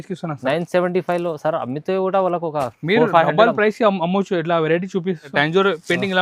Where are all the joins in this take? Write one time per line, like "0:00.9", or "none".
0:05.3